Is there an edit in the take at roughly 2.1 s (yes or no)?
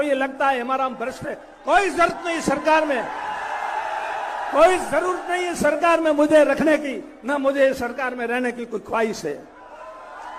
no